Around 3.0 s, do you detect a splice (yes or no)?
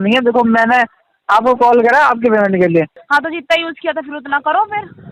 yes